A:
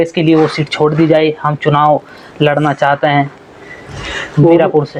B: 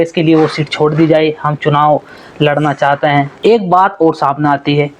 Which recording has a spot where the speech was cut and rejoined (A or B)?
B